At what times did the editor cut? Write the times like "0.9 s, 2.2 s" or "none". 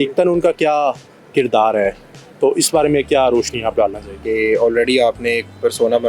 4.2 s